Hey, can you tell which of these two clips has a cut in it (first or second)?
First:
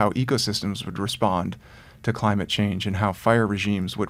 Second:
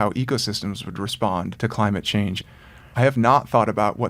second